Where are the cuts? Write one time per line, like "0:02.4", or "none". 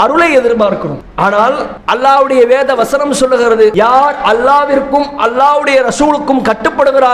0:01.0
0:01.7